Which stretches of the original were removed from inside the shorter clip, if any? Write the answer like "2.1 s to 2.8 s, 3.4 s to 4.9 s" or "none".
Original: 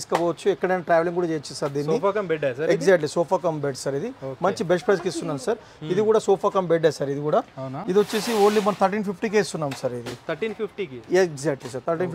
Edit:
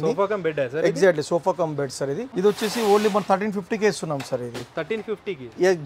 4.1 s to 7.8 s